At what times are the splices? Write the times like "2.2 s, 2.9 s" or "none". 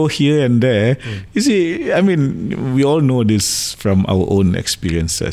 none

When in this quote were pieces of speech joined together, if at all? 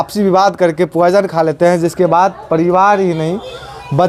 none

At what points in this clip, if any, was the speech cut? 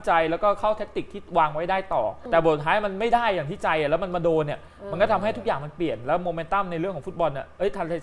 2.2 s

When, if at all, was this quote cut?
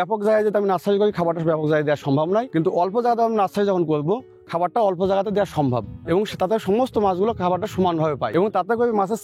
2.5 s, 8.2 s

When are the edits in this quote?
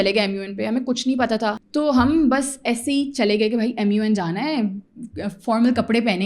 1.6 s

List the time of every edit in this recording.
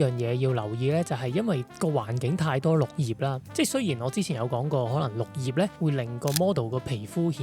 none

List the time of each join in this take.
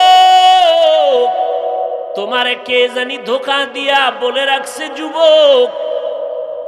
2.2 s

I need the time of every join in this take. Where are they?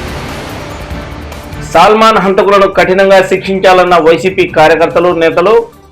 1.5 s

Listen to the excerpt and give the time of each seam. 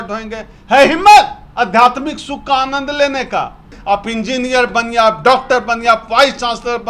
3.7 s

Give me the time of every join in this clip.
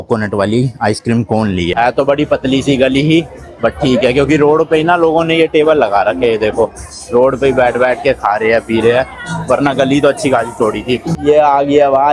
1.7 s, 11.1 s

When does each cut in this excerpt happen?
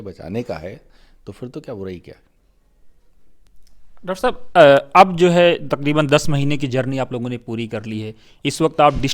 none

